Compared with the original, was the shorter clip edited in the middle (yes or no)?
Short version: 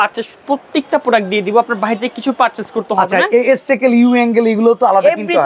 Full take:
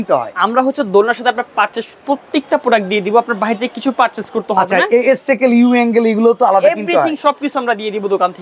no